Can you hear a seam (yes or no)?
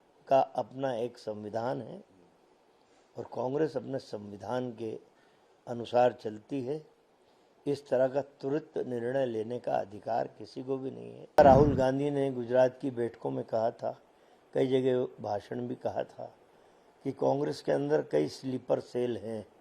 yes